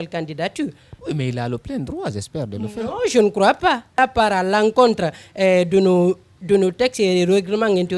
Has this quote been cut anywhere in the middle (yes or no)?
yes